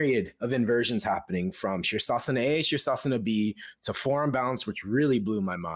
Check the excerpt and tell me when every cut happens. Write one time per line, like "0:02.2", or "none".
none